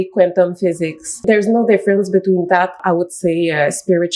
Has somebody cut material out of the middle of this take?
yes; 2 cuts; at 1.2 s, 2.8 s

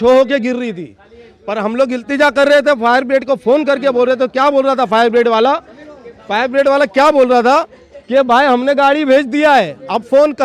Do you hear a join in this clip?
no; 0 cuts

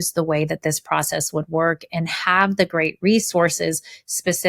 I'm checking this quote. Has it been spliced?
no; 0 cuts

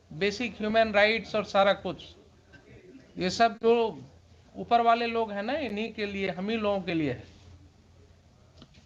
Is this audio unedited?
yes; 0 cuts

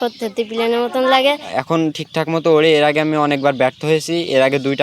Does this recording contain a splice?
yes; 1 cut; at 1.4 s

